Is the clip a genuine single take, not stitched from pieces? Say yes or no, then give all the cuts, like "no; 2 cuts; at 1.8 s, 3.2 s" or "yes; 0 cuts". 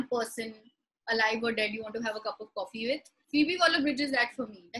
yes; 0 cuts